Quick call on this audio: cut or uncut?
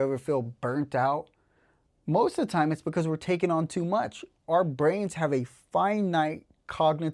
uncut